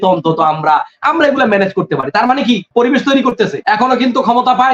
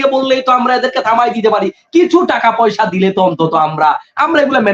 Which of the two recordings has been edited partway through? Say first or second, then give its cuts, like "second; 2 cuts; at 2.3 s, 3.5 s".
first; 2 cuts; at 2.7 s, 3.6 s